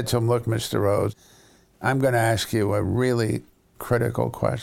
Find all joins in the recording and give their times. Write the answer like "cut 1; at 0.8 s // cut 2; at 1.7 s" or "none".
cut 1; at 1.1 s